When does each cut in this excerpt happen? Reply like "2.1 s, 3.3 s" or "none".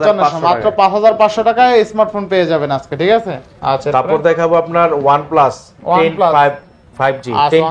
none